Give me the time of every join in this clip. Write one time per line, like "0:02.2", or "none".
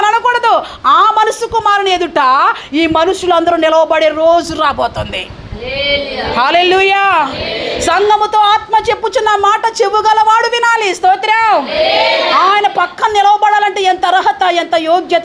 none